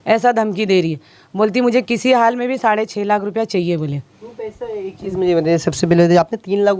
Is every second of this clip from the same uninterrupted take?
yes; 0 cuts

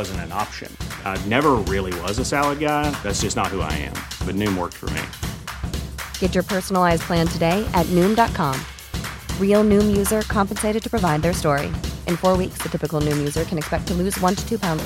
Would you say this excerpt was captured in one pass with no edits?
yes; 0 cuts

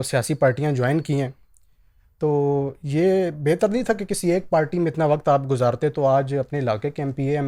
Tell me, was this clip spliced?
no; 0 cuts

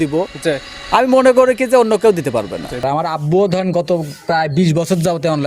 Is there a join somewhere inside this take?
yes; 1 cut; at 2.8 s

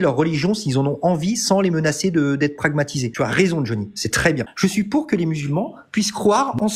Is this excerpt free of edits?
no; 2 cuts; at 3.1 s, 4.5 s

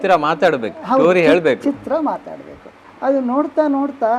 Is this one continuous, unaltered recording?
no; 1 cut; at 2.8 s

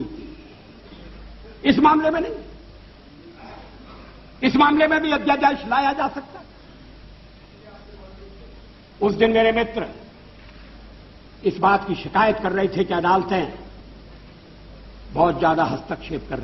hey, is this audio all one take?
yes; 0 cuts

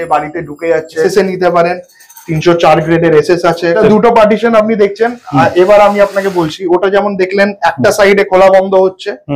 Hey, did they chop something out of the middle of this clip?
yes; 2 cuts; at 1.0 s, 3.8 s

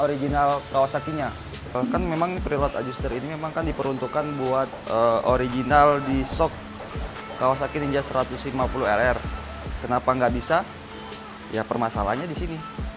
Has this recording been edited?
yes; 1 cut; at 1.8 s

